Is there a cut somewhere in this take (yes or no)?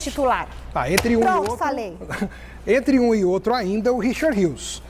no